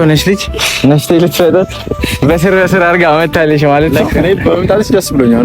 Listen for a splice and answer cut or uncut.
cut